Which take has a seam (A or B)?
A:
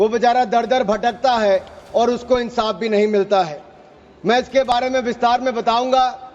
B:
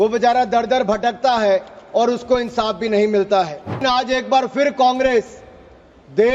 B